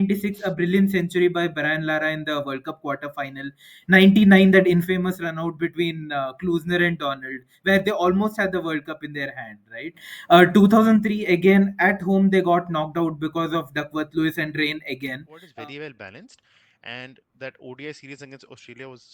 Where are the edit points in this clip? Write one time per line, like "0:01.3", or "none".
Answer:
0:15.5